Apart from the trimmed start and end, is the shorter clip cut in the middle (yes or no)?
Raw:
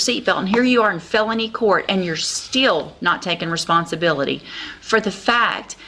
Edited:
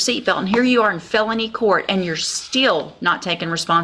no